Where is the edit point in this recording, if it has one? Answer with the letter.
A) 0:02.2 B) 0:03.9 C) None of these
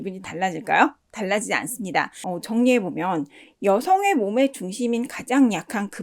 A